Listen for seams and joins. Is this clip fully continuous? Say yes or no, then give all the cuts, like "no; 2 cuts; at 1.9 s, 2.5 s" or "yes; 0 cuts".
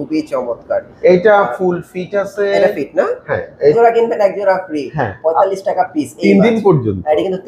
no; 1 cut; at 3.7 s